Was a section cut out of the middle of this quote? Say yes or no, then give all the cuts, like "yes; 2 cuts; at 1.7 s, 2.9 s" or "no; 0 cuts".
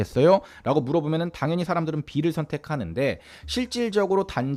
no; 0 cuts